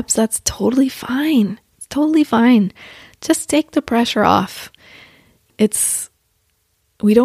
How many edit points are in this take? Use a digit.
1